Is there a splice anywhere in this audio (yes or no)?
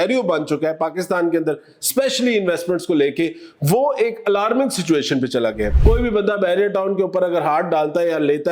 yes